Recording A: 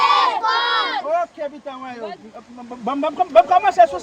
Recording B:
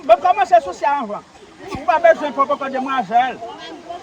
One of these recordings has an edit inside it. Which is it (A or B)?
B